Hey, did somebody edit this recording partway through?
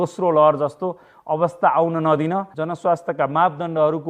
yes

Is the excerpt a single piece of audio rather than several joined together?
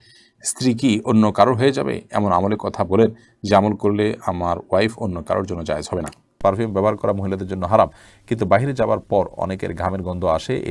no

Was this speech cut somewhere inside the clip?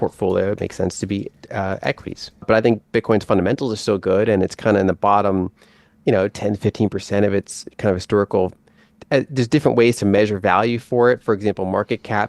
yes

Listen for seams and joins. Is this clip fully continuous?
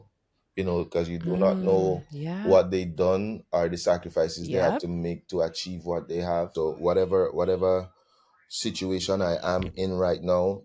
no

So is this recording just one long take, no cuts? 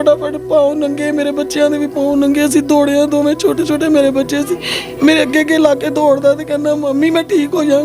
yes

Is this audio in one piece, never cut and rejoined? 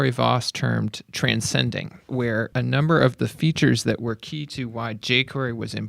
no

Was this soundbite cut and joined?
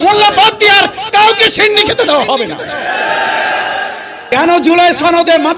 yes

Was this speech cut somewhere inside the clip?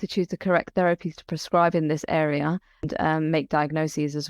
yes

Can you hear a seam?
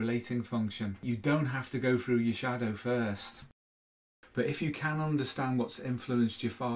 yes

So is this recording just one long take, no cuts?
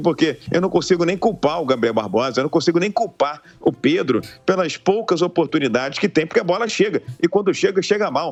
yes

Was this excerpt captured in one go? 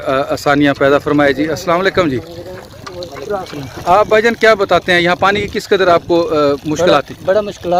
yes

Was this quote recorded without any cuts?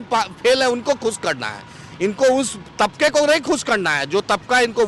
yes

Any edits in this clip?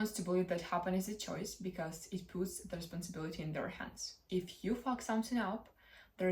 yes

